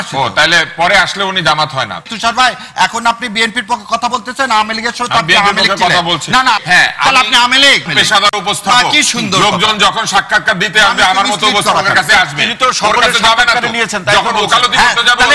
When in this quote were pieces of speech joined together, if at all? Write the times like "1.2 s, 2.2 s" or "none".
2.0 s, 6.6 s, 7.9 s